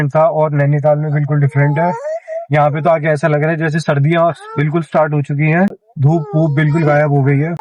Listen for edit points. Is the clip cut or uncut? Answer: uncut